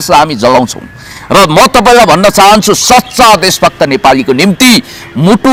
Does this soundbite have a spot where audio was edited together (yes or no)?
no